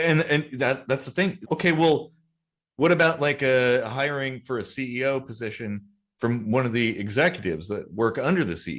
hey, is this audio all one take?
yes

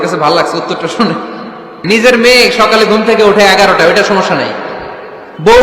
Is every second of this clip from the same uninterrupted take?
no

